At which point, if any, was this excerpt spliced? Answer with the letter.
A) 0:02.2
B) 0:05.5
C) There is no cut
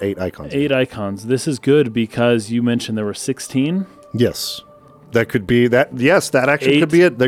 C